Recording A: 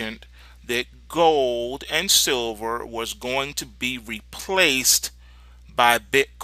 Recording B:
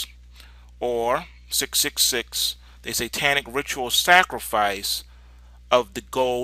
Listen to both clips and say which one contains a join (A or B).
B